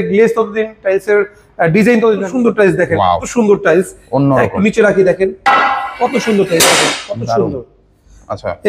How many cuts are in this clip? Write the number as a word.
one